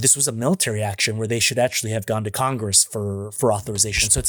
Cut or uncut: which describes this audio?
uncut